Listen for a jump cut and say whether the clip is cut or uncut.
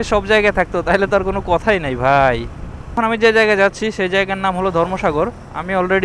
cut